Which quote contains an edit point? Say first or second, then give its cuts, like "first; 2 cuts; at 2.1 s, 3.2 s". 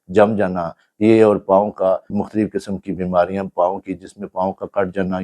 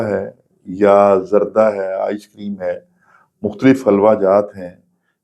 first; 1 cut; at 2.1 s